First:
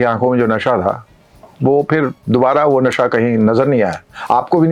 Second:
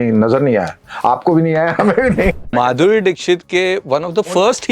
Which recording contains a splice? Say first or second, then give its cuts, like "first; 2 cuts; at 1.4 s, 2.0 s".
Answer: second; 1 cut; at 2.4 s